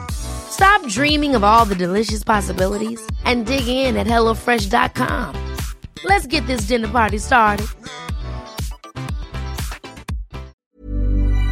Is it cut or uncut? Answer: cut